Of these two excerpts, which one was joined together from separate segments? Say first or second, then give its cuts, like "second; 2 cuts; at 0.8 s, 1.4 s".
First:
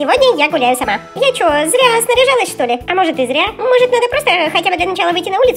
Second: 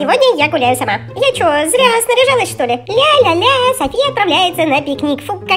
second; 1 cut; at 2.8 s